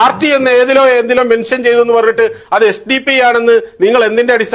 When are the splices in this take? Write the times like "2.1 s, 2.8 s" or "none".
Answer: none